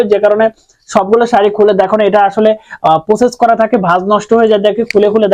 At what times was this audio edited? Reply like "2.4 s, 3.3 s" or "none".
none